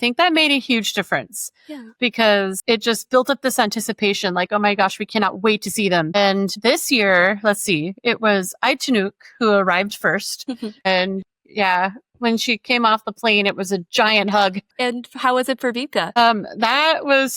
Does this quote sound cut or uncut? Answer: cut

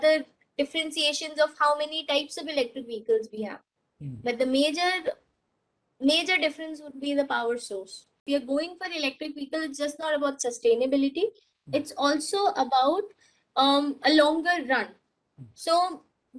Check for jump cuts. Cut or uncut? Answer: cut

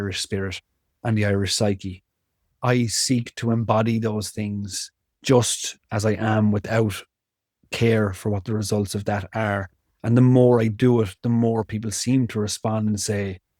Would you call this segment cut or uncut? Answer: cut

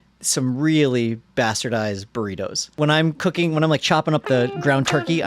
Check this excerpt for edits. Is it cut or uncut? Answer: cut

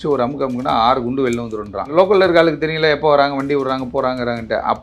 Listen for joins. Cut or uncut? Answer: cut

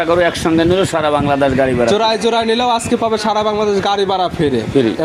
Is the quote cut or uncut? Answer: uncut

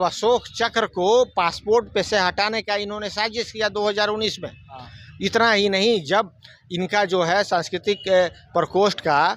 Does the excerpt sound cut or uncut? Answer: uncut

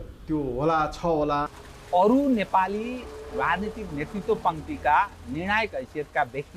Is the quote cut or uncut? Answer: cut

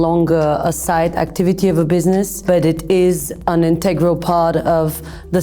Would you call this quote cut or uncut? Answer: cut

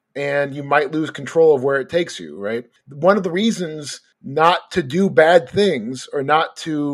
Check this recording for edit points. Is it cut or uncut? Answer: uncut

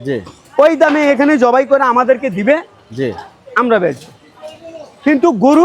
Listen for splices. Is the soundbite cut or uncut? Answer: uncut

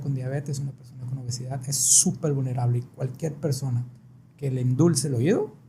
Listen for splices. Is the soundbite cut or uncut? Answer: uncut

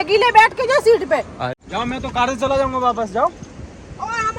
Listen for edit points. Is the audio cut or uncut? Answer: cut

